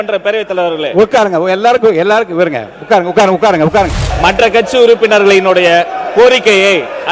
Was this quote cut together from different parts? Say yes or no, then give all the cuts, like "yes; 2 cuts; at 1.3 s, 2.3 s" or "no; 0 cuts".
yes; 1 cut; at 4.0 s